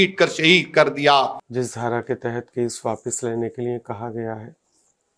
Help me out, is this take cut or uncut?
cut